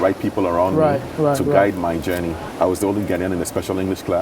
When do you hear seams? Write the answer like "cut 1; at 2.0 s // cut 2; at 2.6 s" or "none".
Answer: cut 1; at 2.4 s